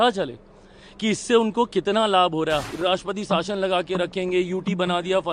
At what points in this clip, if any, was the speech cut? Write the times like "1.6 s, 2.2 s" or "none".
2.6 s